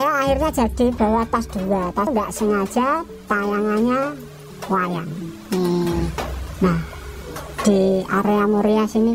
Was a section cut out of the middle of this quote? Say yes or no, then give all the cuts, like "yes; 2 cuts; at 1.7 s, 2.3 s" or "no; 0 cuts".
yes; 1 cut; at 2.1 s